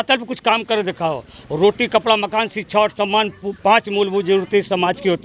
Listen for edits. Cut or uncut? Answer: uncut